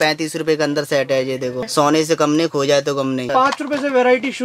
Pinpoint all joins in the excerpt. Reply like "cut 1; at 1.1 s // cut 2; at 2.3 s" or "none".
cut 1; at 1.7 s // cut 2; at 3.3 s